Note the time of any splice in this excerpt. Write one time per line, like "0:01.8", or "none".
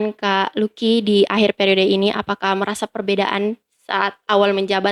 none